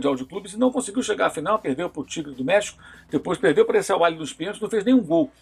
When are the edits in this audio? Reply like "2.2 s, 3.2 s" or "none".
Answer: none